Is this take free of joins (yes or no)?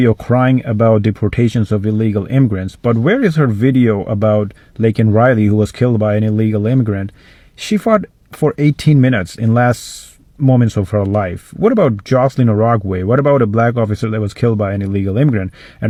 yes